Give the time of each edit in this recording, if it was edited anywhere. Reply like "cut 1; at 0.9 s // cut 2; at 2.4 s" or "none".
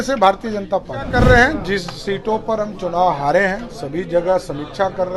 cut 1; at 1.1 s